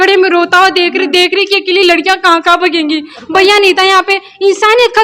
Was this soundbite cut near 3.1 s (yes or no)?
no